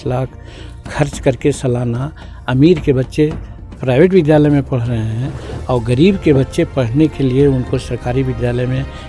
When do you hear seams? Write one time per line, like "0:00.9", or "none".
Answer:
none